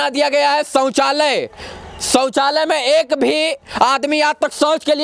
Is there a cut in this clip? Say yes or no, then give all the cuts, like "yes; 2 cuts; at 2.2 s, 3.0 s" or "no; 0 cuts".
no; 0 cuts